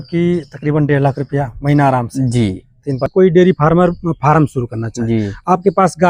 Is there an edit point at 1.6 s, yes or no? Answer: no